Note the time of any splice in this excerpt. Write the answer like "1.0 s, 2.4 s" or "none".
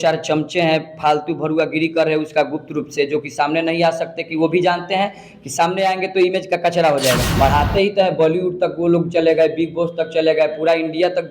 7.3 s